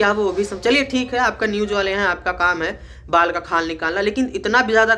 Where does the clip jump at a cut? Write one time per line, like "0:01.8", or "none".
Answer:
none